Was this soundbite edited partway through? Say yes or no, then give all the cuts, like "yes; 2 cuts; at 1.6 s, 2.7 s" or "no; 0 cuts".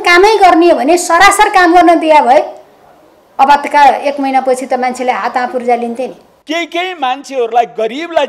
yes; 1 cut; at 6.3 s